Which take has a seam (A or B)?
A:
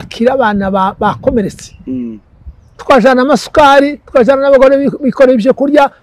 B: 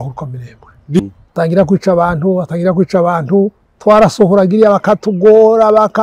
B